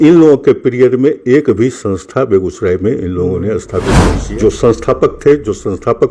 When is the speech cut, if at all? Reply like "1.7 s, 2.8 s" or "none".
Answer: 4.2 s